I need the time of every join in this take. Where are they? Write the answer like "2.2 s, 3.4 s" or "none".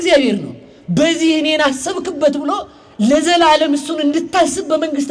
none

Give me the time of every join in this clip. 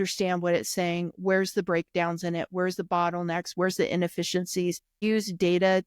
4.9 s

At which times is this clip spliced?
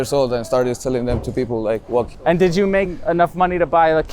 2.1 s, 2.9 s

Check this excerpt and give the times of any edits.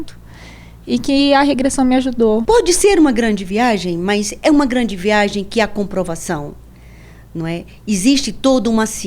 2.4 s

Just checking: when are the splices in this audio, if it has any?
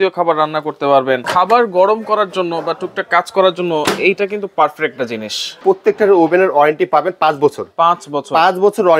1.3 s, 5.5 s

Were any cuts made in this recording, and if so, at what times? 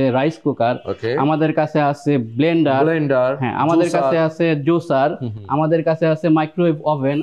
none

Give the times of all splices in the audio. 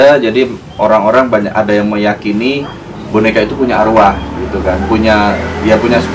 none

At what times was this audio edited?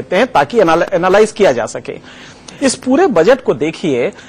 none

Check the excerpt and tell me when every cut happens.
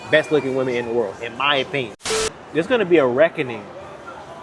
2.1 s

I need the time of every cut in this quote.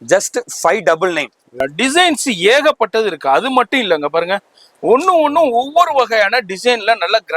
1.6 s

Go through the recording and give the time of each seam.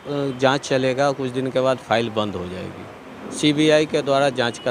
none

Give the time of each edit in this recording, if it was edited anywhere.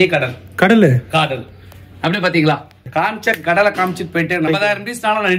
2.9 s, 4.5 s

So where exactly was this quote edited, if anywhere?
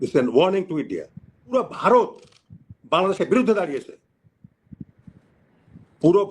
1.5 s

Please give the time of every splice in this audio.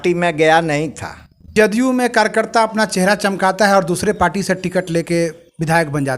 1.5 s

